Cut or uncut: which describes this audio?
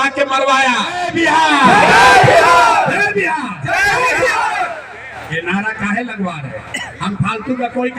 cut